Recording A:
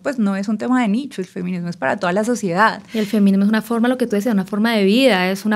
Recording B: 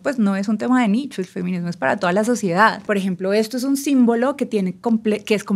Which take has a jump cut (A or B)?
B